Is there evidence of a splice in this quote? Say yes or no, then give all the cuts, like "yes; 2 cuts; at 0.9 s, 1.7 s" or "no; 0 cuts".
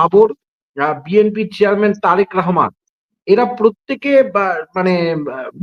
no; 0 cuts